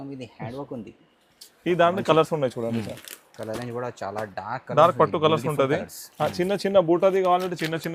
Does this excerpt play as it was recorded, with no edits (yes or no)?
yes